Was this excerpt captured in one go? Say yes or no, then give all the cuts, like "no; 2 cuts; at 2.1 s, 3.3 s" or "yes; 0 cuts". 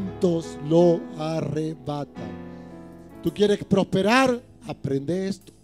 yes; 0 cuts